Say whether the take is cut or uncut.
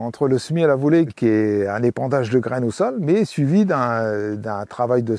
cut